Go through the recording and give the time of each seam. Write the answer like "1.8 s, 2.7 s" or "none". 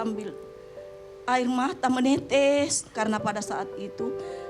2.8 s